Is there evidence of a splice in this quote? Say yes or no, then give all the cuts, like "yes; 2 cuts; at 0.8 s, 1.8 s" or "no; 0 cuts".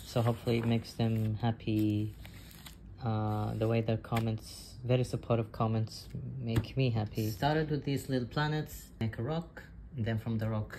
yes; 2 cuts; at 7.3 s, 9.0 s